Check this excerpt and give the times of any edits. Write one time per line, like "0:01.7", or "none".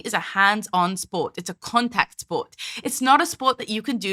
none